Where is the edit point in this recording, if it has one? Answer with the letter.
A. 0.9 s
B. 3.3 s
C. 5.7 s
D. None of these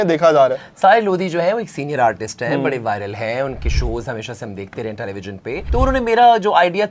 C